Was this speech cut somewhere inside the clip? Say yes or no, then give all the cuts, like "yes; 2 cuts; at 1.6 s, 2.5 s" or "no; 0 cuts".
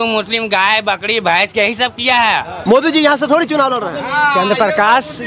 yes; 1 cut; at 2.5 s